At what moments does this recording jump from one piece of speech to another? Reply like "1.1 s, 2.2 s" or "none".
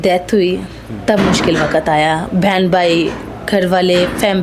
none